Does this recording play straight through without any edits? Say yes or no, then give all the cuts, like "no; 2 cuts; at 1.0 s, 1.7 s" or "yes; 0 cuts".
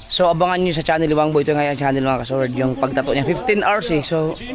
yes; 0 cuts